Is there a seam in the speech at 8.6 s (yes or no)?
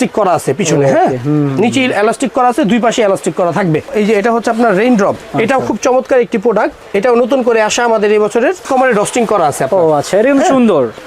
yes